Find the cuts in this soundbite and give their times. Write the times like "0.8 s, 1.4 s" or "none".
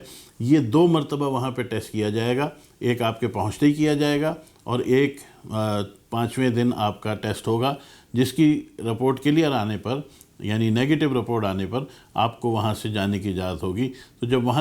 none